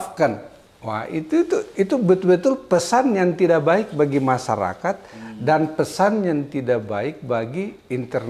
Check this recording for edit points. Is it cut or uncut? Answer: uncut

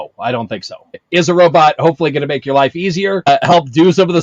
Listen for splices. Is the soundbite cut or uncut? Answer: cut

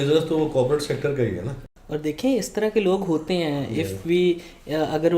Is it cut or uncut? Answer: cut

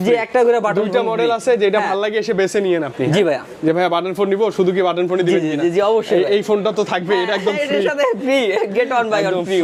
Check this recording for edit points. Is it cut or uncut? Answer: uncut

